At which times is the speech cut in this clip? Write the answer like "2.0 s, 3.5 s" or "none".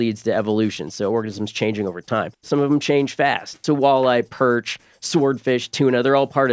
2.5 s, 3.6 s